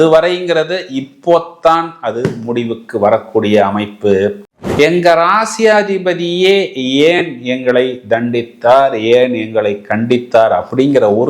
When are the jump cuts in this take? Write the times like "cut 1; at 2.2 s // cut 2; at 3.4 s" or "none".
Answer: cut 1; at 4.4 s